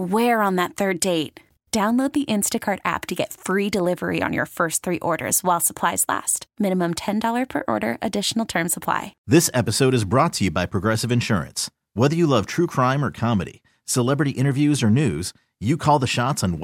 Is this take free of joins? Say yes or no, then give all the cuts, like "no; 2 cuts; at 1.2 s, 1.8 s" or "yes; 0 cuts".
no; 1 cut; at 9.1 s